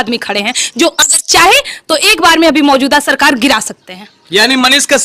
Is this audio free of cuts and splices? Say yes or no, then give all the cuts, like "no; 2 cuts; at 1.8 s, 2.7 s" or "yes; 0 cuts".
yes; 0 cuts